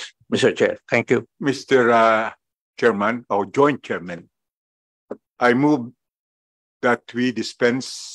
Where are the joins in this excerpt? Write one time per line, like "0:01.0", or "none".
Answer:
0:01.3